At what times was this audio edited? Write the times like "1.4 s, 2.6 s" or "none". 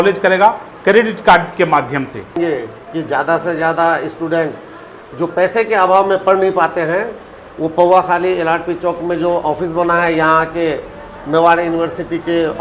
2.4 s

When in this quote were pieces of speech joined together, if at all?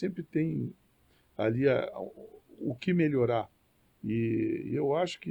none

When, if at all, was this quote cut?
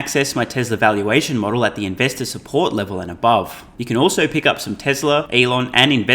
3.7 s, 5.3 s

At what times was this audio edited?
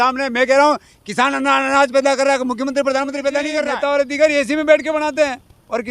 3.7 s

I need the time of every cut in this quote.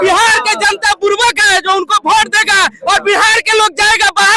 none

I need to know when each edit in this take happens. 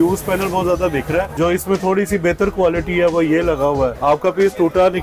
1.3 s, 4.0 s

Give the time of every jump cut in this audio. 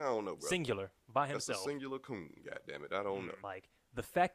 0.9 s, 3.4 s

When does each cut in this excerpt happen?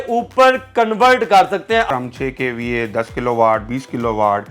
1.9 s

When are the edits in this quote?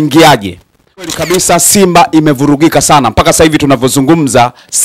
1.0 s

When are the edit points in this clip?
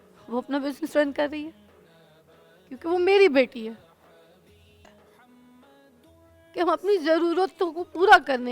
4.7 s

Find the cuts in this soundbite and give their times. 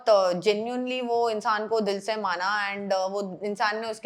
none

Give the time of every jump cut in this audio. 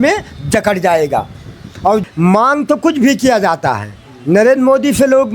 2.0 s

